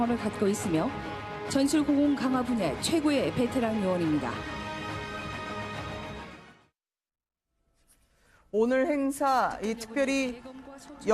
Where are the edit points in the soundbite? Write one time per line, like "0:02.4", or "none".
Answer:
none

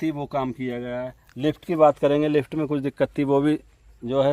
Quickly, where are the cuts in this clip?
none

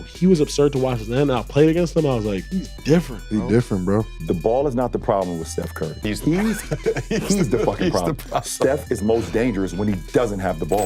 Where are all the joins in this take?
0:02.5
0:04.1
0:06.0

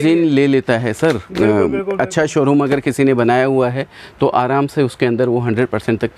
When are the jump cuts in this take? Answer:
none

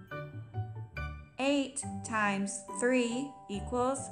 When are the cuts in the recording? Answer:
0:01.2

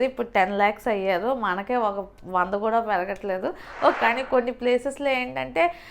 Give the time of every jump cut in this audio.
0:03.9

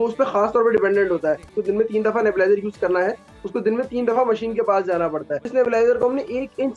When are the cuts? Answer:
0:01.4
0:05.4

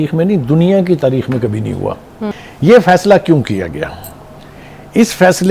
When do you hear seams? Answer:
0:02.3

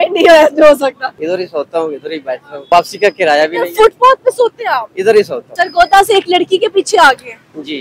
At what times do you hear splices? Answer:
0:01.1
0:02.5
0:05.4

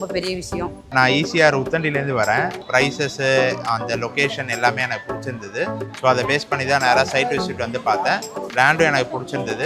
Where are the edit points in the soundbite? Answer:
0:00.9
0:02.6

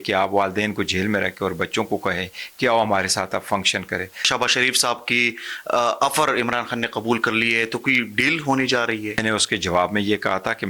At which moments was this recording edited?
0:04.3
0:09.2

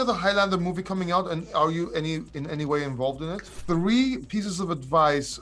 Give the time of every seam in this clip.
0:03.5

